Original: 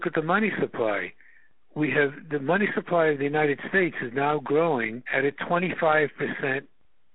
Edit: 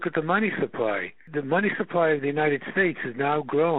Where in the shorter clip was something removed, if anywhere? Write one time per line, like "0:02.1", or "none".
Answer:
0:01.2